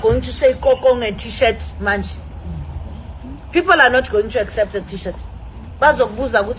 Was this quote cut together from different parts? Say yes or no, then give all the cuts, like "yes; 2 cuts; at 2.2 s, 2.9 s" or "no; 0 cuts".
no; 0 cuts